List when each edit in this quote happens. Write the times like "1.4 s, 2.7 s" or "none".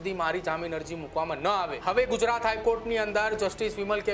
1.8 s